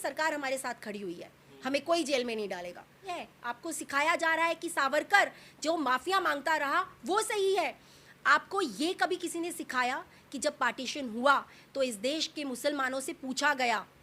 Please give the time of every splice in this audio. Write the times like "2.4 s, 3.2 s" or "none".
3.2 s